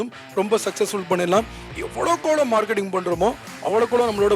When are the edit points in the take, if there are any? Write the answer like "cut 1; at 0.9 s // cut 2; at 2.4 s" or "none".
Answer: none